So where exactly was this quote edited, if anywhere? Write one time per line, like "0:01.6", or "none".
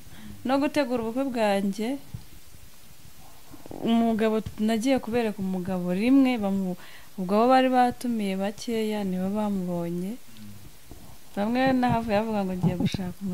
none